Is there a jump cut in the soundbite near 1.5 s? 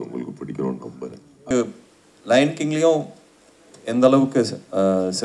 yes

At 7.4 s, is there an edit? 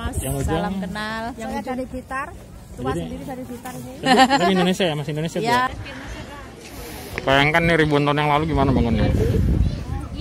no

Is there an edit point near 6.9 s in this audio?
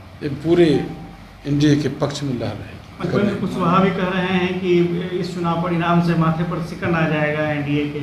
no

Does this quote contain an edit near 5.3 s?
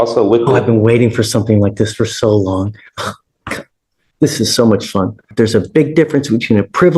yes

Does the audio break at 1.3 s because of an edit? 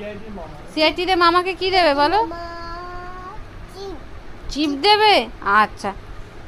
yes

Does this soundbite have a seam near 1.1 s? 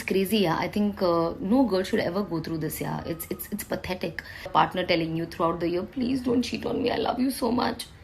no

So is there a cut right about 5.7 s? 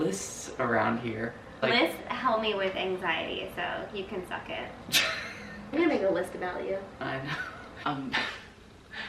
yes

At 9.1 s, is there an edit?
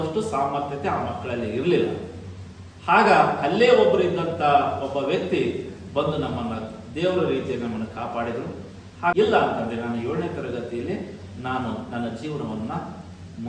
yes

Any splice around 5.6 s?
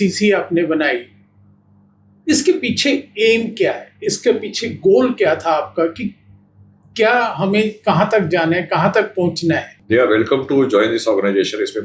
no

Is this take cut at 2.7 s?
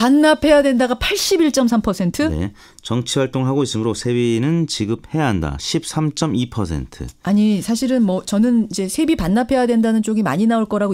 no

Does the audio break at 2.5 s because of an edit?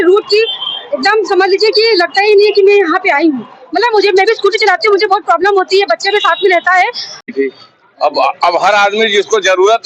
no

